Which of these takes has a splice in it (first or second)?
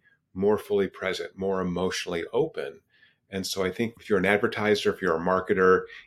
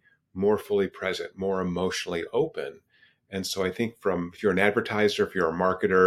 first